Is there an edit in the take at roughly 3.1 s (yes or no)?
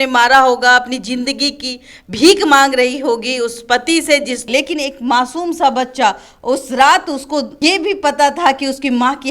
no